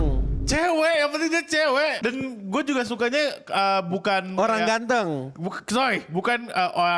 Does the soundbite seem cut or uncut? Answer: cut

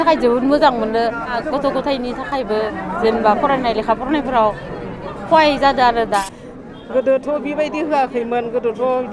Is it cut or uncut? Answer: cut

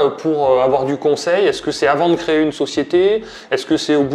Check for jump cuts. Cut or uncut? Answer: uncut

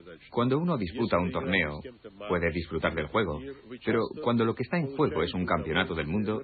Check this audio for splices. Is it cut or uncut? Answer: cut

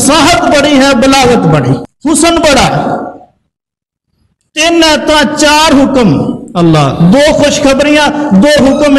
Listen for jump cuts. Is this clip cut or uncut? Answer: cut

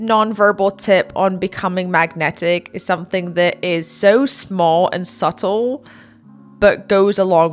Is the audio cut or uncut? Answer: uncut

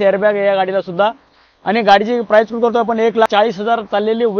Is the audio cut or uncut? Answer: cut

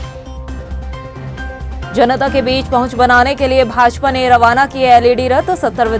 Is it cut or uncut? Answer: cut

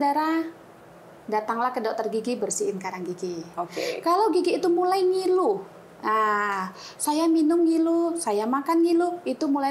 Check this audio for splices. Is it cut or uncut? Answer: uncut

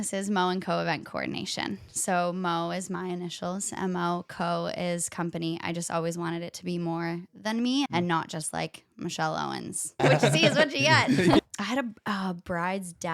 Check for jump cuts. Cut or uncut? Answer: cut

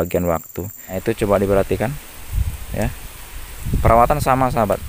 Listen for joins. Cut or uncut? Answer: cut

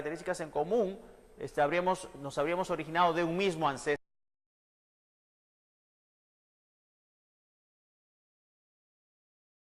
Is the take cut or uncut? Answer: uncut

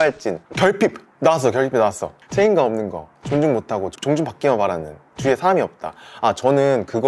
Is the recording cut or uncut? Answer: uncut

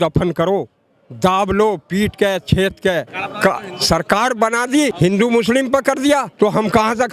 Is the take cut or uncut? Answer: cut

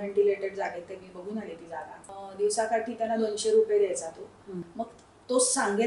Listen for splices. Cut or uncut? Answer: cut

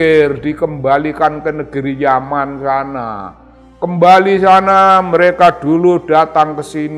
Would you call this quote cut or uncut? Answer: uncut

